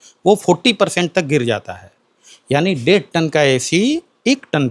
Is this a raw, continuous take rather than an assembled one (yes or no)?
yes